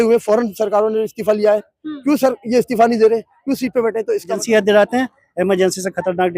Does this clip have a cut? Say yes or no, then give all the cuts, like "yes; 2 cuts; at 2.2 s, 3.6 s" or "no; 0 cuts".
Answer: yes; 1 cut; at 4.4 s